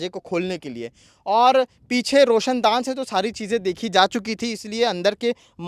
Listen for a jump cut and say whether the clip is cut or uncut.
uncut